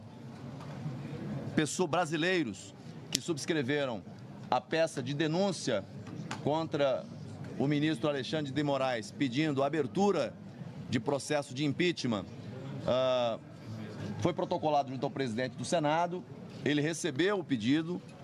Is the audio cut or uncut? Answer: cut